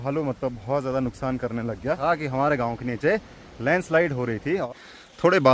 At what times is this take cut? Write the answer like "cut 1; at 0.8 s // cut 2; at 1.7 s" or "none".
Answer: cut 1; at 2.0 s // cut 2; at 4.7 s